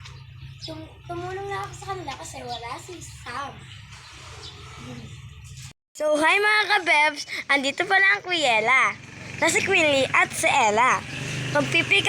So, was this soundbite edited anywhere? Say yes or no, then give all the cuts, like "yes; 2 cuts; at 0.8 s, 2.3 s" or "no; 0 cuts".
yes; 1 cut; at 5.8 s